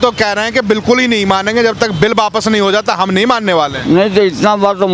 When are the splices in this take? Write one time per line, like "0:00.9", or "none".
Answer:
none